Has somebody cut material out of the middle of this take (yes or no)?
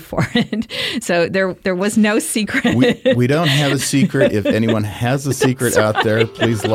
no